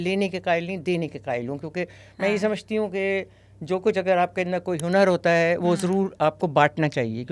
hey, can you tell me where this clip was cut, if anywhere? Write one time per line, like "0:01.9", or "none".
none